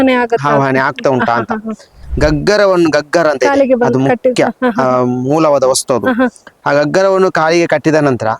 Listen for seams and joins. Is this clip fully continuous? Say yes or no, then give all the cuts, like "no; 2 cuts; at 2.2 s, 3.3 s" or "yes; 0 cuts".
no; 1 cut; at 2.0 s